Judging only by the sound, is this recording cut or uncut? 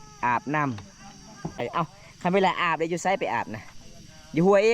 cut